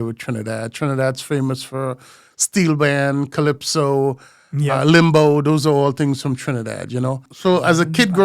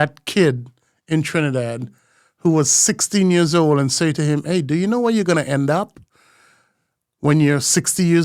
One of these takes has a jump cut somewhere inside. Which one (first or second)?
first